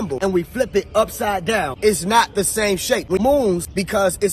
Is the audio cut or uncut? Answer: cut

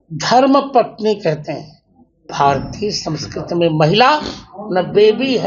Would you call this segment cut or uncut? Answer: cut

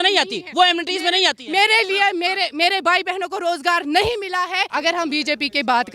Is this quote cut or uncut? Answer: cut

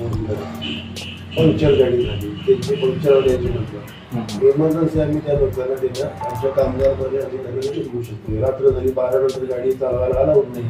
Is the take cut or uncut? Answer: cut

